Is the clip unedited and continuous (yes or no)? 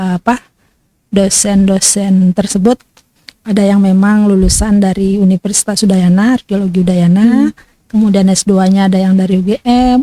yes